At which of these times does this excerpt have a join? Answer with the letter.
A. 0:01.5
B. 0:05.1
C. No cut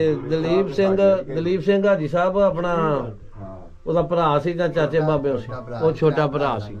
C